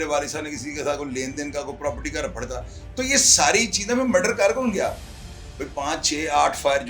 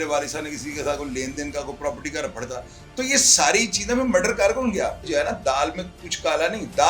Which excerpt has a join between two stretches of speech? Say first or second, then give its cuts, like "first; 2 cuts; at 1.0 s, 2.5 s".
second; 1 cut; at 5.1 s